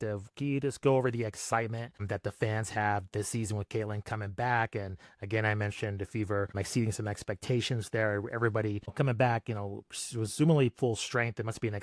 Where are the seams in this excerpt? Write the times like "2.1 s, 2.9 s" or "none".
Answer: 2.0 s, 6.6 s, 8.9 s